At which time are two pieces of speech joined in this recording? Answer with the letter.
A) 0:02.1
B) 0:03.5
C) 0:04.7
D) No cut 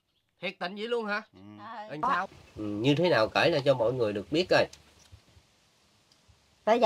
A